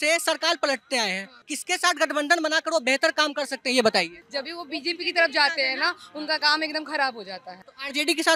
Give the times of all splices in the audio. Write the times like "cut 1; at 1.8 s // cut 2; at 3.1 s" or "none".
none

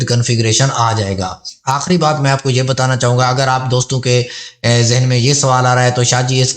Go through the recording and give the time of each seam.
cut 1; at 1.5 s

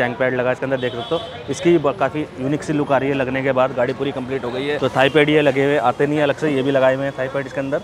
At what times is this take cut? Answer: none

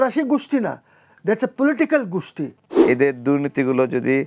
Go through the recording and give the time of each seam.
cut 1; at 2.6 s

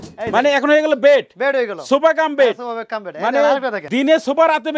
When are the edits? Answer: cut 1; at 3.8 s

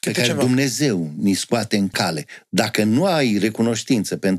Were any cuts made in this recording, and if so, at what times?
cut 1; at 1.9 s

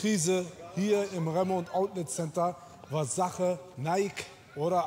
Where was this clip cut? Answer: none

